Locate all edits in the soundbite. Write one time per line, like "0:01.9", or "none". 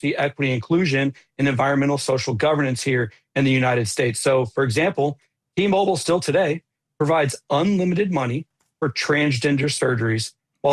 none